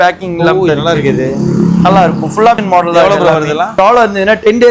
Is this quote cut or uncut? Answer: cut